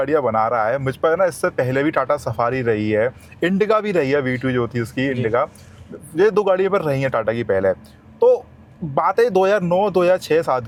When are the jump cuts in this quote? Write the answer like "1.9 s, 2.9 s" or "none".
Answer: none